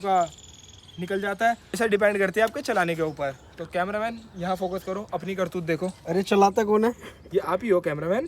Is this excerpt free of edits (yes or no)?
no